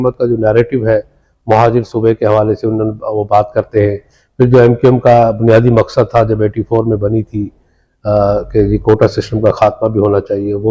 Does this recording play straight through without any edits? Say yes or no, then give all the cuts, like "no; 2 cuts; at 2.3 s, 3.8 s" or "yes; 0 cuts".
yes; 0 cuts